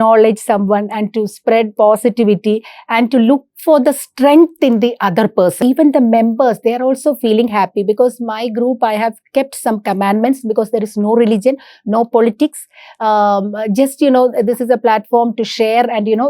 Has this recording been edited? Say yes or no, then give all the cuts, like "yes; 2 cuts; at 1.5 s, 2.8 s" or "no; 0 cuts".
yes; 1 cut; at 5.6 s